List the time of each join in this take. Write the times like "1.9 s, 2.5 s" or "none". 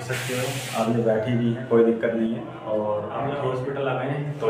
3.3 s